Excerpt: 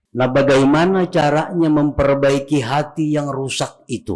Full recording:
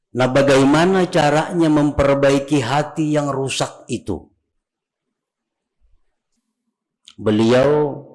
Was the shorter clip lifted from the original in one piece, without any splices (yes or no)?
yes